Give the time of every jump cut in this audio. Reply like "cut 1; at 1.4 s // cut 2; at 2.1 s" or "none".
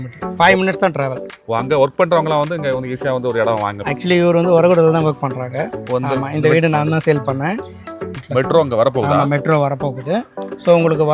cut 1; at 7.8 s

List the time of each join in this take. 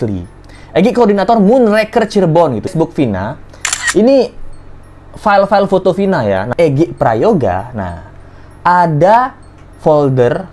cut 1; at 2.7 s // cut 2; at 6.5 s

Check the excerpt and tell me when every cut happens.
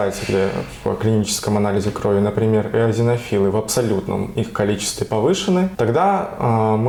none

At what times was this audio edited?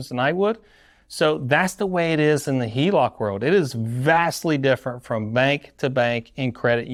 none

